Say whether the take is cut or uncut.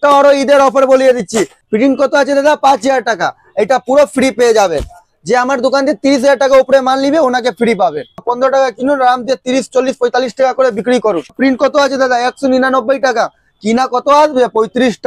cut